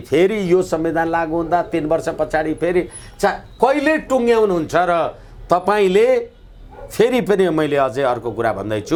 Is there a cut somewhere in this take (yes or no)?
no